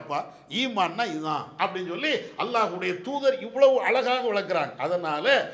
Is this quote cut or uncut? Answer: uncut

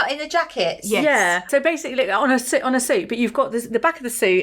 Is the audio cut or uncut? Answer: cut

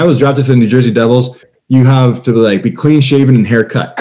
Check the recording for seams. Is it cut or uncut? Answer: cut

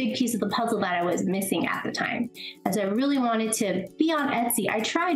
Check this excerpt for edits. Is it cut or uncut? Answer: uncut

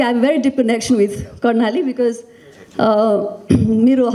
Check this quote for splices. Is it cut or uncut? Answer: uncut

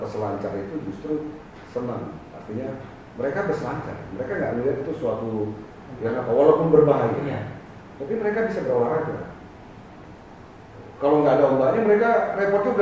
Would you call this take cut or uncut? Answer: uncut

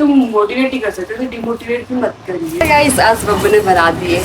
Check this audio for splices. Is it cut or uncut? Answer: cut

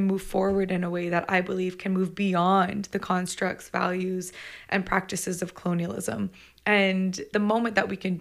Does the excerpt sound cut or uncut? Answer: cut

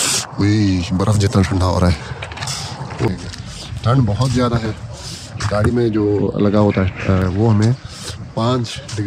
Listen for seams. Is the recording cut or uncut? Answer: cut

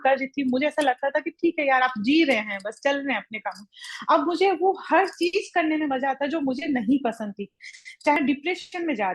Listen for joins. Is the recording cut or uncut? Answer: cut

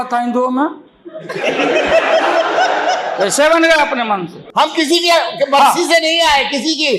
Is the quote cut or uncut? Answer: cut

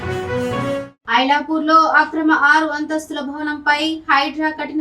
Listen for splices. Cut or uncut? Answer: cut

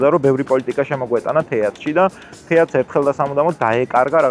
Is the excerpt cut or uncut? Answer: uncut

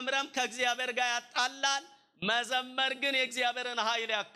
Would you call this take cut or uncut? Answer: uncut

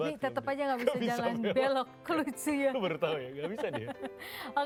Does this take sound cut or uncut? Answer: uncut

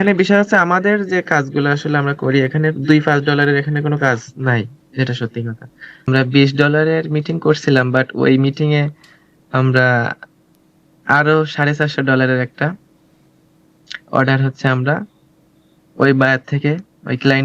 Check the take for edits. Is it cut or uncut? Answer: cut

